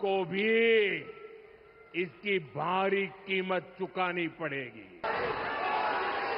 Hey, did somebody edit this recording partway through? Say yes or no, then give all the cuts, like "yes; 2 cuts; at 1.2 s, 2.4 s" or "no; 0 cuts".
yes; 1 cut; at 5.0 s